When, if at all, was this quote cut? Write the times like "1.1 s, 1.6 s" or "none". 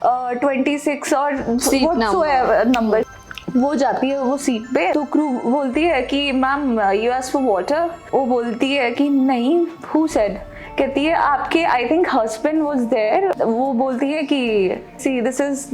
3.1 s, 4.9 s, 8.0 s, 13.4 s, 15.0 s